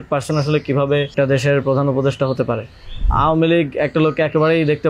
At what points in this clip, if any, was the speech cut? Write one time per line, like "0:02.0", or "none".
0:01.1
0:03.0